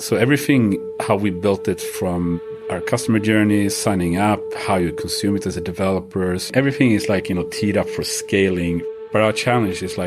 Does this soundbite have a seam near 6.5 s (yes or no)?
yes